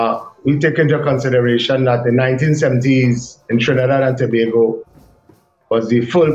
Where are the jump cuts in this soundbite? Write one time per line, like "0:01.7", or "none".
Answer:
none

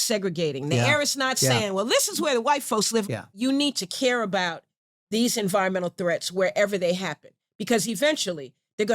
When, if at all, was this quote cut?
0:03.1

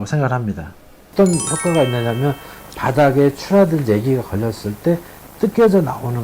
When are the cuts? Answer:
0:01.1

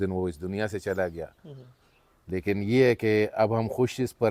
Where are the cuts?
none

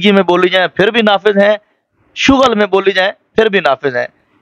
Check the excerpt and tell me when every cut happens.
none

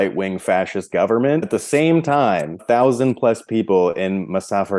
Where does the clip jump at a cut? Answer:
0:01.5
0:02.6

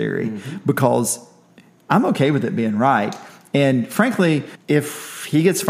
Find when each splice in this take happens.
0:04.5

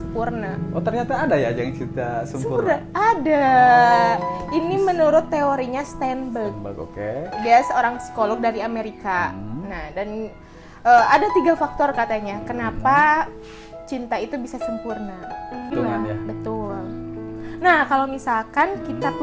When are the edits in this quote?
0:15.7

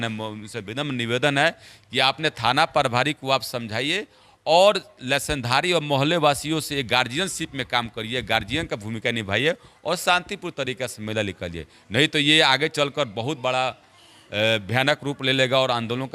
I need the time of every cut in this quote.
none

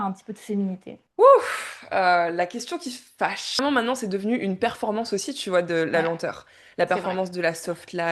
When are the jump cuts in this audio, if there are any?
0:03.6

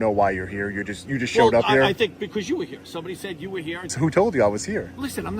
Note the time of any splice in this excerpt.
0:03.9

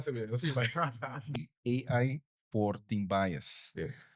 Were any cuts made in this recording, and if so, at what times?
0:01.3

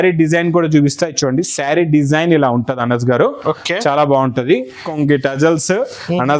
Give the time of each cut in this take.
0:04.9

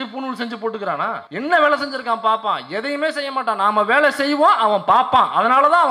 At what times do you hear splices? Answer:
0:01.2

